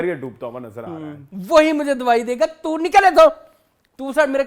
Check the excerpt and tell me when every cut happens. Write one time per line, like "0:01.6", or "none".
0:01.2